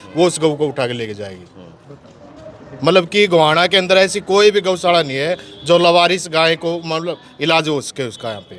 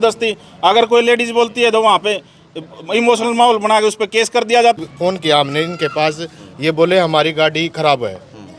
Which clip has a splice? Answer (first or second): second